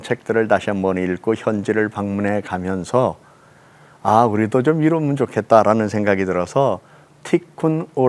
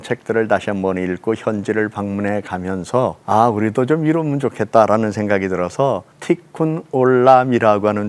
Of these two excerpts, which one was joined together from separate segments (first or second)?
second